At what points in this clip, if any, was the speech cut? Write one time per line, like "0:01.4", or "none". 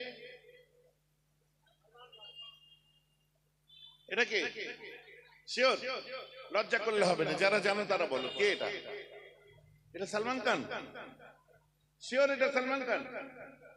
none

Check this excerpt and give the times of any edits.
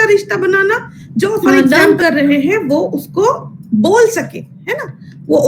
0:01.4

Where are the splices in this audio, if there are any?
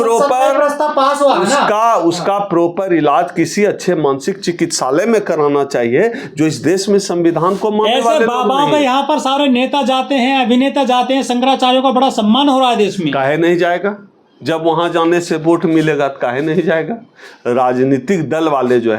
none

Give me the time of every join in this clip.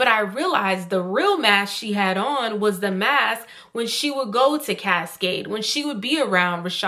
none

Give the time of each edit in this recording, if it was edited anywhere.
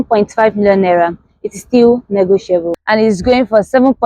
0:02.8

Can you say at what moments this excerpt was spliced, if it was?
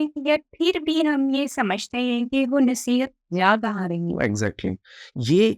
none

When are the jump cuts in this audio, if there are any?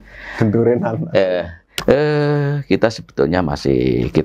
0:01.6

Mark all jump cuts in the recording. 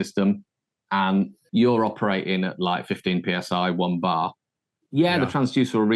0:01.4

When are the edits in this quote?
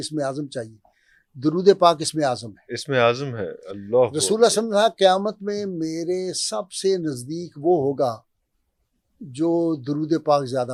none

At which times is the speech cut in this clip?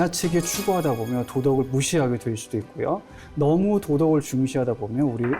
0:03.2

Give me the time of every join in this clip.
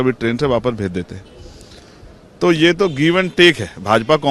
none

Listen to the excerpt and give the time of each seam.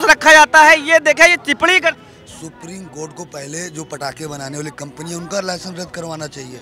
0:02.0

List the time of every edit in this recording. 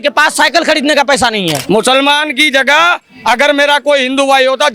0:01.6

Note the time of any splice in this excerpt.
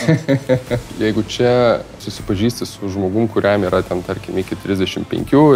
0:00.9
0:02.1

